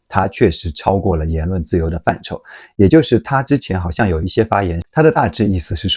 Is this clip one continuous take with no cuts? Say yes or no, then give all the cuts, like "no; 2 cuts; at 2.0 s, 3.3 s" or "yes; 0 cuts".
yes; 0 cuts